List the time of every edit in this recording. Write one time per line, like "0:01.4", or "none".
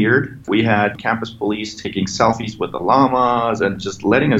0:00.9